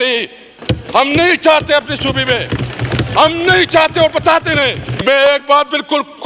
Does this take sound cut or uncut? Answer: cut